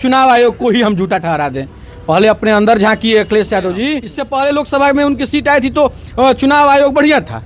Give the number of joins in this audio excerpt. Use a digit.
1